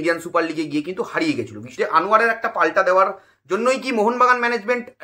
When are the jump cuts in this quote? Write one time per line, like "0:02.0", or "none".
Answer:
0:01.7